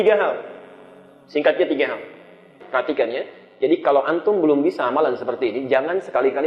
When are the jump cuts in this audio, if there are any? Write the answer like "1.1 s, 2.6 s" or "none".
2.5 s